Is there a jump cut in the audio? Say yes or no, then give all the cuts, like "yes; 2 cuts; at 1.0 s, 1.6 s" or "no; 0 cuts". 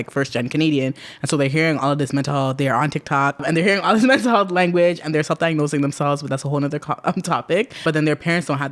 yes; 2 cuts; at 3.4 s, 7.8 s